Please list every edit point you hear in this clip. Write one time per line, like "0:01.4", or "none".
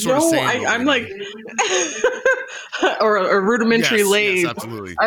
none